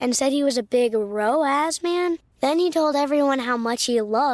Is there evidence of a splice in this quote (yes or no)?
no